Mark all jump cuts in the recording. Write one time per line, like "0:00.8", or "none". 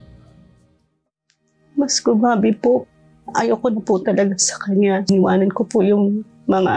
0:00.9